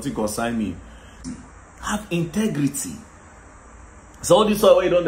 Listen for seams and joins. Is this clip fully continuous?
no; 1 cut; at 1.2 s

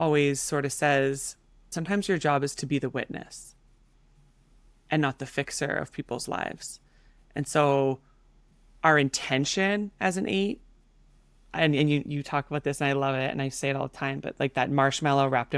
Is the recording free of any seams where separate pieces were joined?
no; 1 cut; at 1.7 s

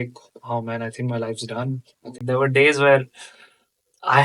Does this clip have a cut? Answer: yes; 1 cut; at 2.1 s

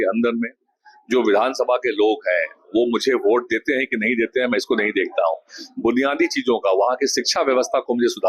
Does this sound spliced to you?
no; 0 cuts

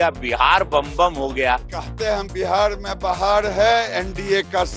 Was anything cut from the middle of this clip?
yes; 1 cut; at 1.6 s

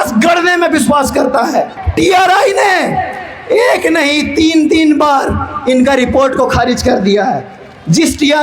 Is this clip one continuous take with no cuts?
no; 1 cut; at 1.8 s

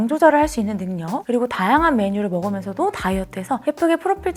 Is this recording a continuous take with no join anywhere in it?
yes; 0 cuts

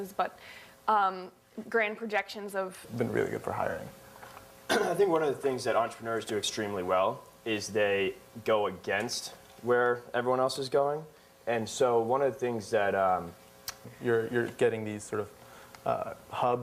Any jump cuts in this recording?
no; 0 cuts

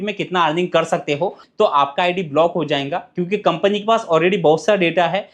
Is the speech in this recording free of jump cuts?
no; 1 cut; at 1.4 s

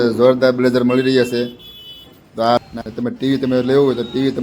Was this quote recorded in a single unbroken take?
no; 1 cut; at 2.6 s

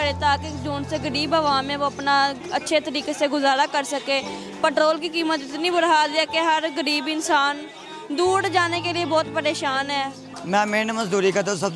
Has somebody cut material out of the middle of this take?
yes; 1 cut; at 10.2 s

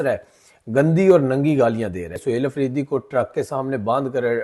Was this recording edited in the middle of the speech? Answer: yes; 1 cut; at 2.2 s

